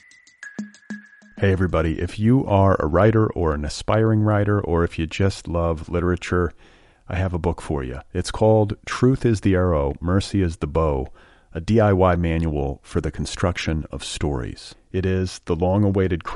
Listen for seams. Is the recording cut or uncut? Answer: cut